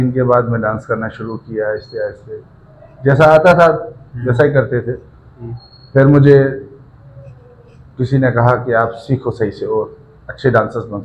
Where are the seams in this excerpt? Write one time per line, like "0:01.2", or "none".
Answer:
none